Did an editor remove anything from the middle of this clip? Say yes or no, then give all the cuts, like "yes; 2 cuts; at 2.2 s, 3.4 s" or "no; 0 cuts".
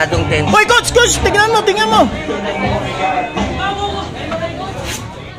no; 0 cuts